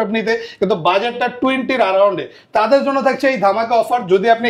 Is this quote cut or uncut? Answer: uncut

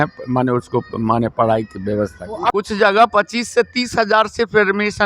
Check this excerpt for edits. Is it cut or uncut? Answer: cut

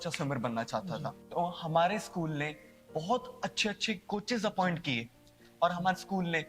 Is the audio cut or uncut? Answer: cut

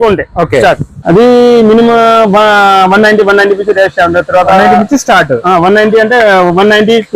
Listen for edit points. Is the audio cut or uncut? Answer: cut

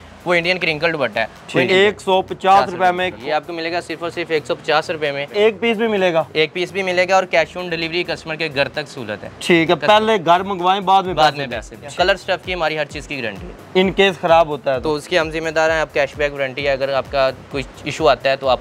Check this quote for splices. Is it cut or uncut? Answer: cut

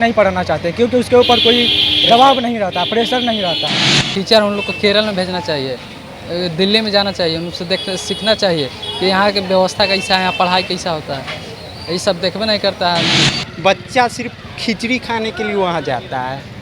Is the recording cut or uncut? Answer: cut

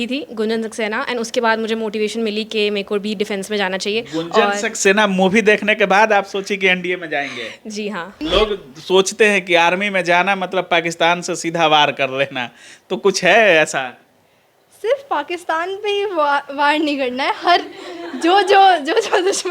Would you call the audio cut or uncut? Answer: cut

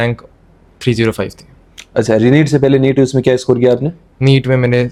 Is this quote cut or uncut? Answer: uncut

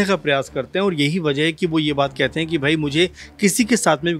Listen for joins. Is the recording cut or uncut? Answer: uncut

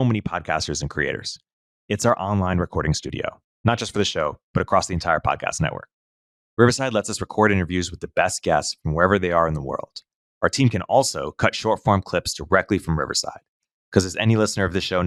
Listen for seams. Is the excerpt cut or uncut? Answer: uncut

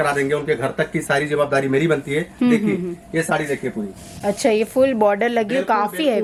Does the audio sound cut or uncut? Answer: uncut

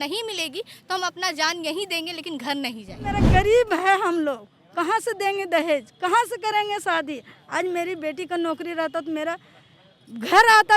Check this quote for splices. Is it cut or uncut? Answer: cut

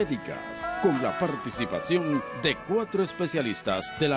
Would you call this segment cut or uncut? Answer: cut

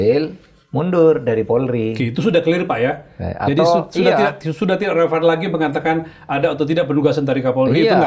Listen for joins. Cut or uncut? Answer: uncut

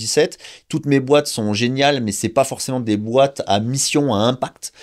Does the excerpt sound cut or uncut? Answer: uncut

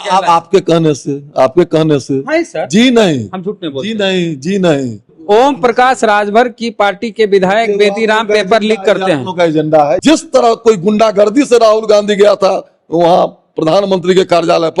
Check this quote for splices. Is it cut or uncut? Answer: cut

